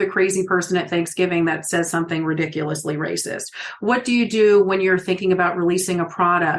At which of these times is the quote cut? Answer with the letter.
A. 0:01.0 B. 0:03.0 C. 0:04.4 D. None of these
D